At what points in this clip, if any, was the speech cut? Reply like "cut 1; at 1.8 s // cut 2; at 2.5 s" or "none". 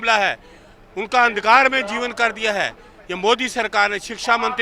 none